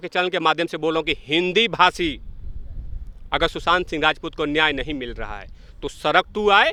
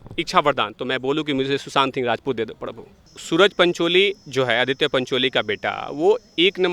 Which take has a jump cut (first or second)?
second